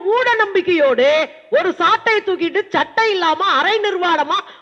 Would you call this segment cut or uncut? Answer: uncut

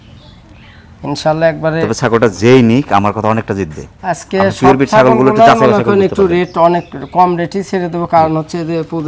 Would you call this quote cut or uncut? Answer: uncut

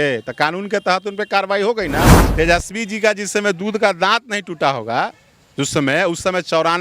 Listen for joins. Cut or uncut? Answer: cut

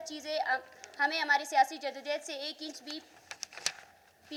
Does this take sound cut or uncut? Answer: uncut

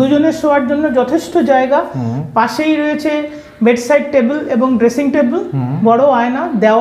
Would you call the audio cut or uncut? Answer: uncut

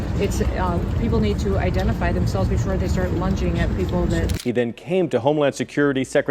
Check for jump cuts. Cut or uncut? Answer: cut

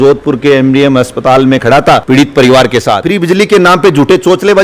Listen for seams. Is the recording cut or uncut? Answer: cut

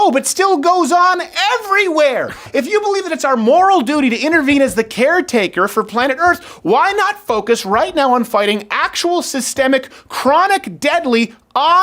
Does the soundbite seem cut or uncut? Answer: cut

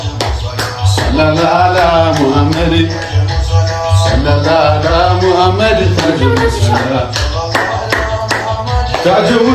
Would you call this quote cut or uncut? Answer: uncut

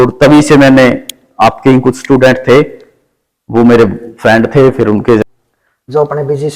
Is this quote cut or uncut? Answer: cut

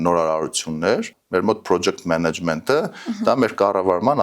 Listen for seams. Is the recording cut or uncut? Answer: cut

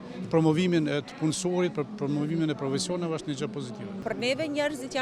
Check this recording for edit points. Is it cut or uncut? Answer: cut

